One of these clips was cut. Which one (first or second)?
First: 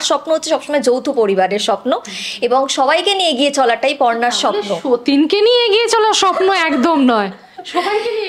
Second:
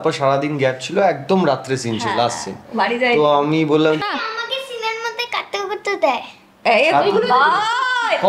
second